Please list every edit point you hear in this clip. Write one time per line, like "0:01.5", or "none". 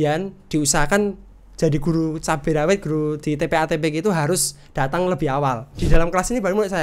0:05.8